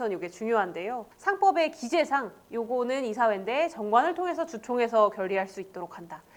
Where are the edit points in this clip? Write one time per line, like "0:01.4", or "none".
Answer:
0:01.1